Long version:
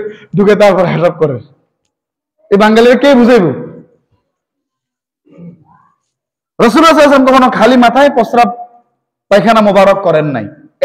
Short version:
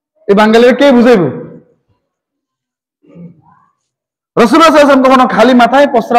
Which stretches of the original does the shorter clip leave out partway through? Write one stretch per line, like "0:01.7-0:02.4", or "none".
none